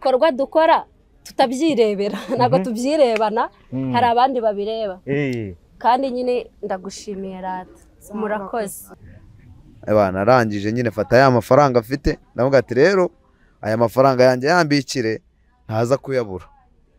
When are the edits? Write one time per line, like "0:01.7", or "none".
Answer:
0:08.9